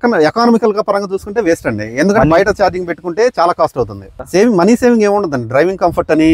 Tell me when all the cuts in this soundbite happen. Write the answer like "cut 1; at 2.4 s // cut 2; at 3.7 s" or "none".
cut 1; at 4.1 s